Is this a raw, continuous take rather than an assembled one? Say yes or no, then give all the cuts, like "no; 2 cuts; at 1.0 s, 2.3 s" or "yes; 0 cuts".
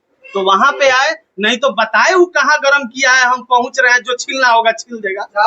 yes; 0 cuts